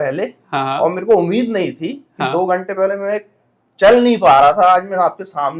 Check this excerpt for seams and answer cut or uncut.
uncut